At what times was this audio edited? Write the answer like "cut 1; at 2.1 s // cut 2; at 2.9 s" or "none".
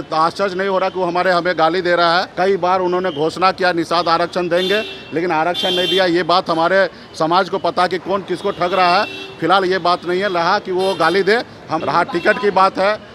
cut 1; at 2.3 s // cut 2; at 11.7 s